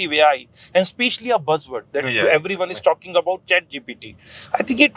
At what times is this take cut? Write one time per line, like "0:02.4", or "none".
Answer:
none

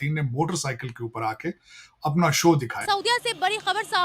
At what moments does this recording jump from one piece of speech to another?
0:02.8

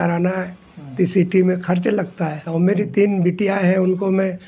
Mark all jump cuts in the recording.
0:02.5

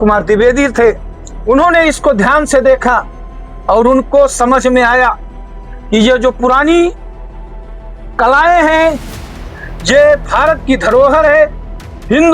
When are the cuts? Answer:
none

